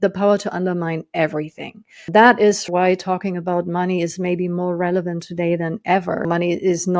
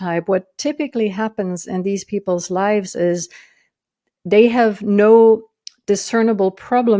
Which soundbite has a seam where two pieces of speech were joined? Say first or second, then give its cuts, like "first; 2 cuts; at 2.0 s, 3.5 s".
first; 3 cuts; at 2.1 s, 2.6 s, 6.2 s